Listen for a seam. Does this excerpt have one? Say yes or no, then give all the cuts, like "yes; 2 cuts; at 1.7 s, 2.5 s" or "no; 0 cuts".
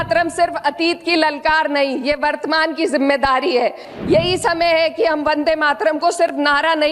yes; 1 cut; at 3.9 s